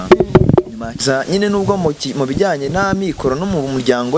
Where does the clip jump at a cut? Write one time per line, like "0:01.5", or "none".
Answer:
0:01.0